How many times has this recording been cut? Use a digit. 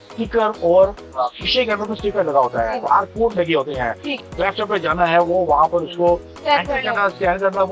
2